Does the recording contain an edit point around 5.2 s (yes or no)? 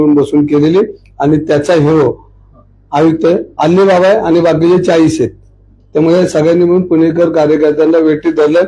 no